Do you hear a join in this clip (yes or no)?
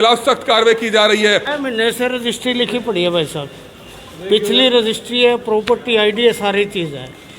yes